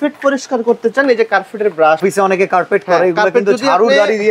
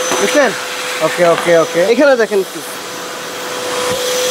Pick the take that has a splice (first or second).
first